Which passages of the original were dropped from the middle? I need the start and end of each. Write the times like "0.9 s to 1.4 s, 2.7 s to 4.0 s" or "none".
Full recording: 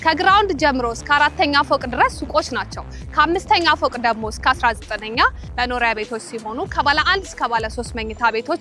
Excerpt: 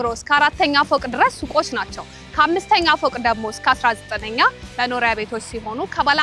none